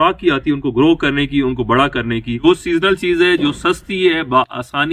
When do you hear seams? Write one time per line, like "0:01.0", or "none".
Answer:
0:02.4